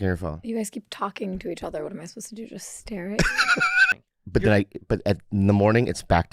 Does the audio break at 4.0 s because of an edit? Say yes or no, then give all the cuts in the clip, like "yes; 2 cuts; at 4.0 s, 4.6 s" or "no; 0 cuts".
yes; 1 cut; at 4.0 s